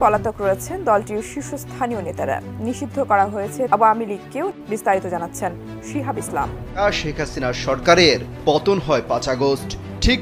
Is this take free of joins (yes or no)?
no